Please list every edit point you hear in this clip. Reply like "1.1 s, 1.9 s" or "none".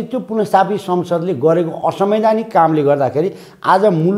none

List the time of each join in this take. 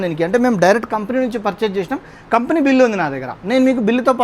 none

